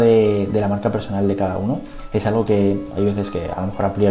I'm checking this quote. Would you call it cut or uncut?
uncut